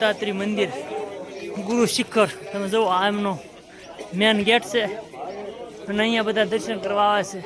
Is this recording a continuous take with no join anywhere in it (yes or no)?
yes